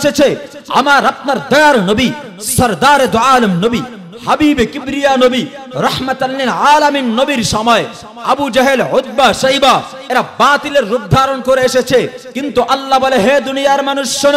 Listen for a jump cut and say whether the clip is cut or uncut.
uncut